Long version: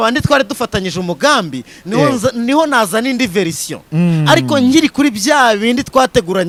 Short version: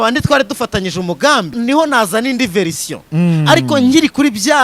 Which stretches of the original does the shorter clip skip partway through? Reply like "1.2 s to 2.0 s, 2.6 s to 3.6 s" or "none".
1.5 s to 2.3 s